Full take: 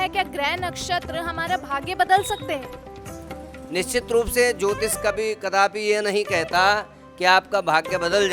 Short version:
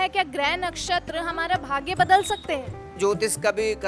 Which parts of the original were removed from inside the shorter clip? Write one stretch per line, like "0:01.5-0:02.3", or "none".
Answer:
0:03.0-0:04.6